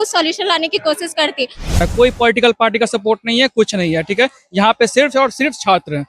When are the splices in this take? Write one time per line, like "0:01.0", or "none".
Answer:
0:01.7